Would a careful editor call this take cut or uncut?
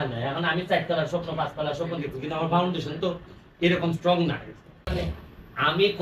cut